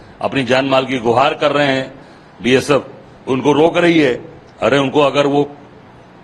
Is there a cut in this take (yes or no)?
no